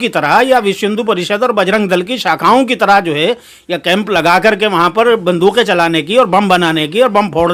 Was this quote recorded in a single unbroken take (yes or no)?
yes